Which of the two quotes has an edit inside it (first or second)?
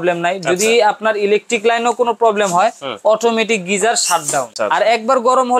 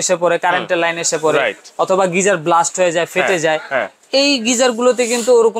first